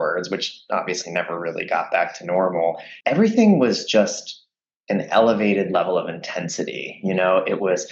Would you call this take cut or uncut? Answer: cut